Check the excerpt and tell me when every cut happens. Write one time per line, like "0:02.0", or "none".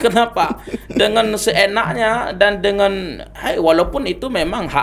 none